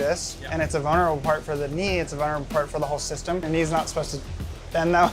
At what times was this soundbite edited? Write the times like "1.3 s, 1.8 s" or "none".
3.4 s